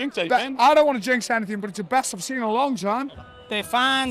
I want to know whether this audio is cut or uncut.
cut